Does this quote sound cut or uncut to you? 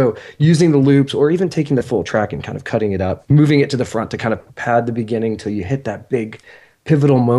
cut